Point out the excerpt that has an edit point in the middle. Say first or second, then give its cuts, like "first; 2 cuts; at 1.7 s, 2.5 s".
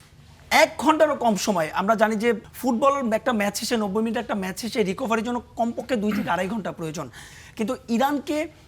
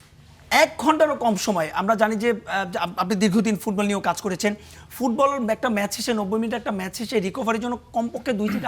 first; 1 cut; at 2.5 s